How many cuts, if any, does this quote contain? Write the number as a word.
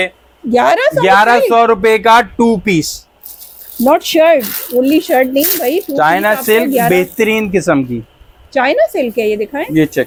zero